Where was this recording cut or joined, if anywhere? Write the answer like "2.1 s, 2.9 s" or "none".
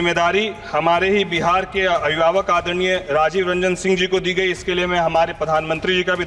none